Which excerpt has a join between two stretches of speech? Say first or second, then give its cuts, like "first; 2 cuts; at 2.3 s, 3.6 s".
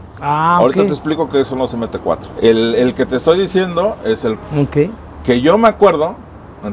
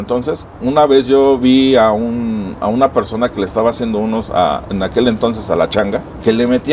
first; 1 cut; at 4.4 s